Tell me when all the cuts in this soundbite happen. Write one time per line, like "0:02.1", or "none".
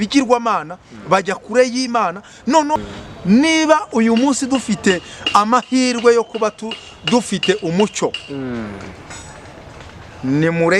0:02.8